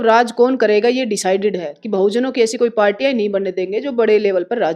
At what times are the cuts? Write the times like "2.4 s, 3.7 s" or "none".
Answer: none

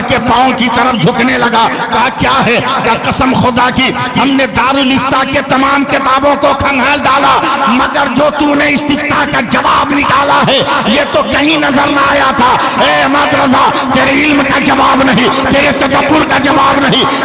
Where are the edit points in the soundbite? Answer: none

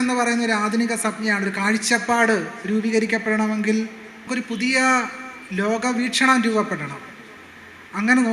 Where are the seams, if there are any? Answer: 4.3 s

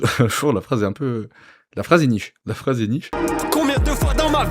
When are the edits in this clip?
3.1 s

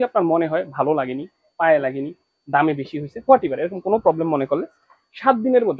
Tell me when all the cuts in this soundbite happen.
none

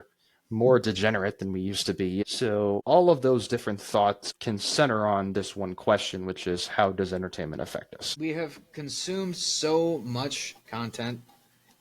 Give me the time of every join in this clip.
2.2 s, 4.3 s, 8.0 s

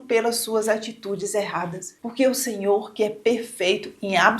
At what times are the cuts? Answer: 2.0 s

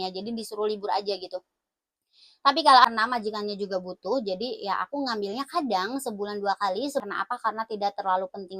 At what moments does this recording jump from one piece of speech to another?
2.8 s, 7.0 s

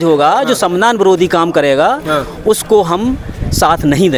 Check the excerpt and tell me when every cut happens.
none

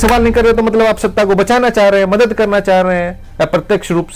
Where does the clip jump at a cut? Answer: none

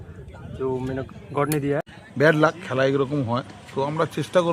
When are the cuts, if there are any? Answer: 1.9 s

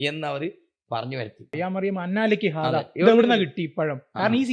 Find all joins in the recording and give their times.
1.5 s

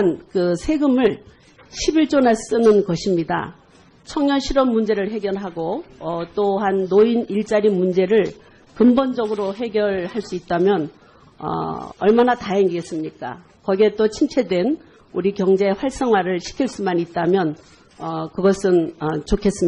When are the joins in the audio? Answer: none

